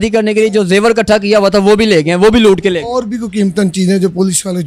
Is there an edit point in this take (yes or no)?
no